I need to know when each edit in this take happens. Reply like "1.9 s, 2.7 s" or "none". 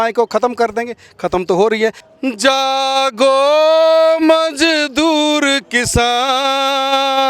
2.0 s